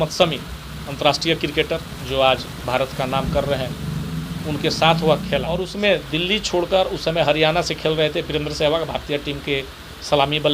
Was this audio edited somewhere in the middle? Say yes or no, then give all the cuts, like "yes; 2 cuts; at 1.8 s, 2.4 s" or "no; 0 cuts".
yes; 1 cut; at 5.7 s